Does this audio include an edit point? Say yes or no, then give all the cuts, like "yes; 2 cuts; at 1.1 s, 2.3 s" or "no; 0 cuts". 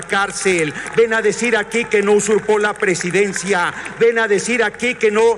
no; 0 cuts